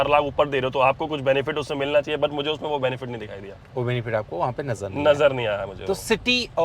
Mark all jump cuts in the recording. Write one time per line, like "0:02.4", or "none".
none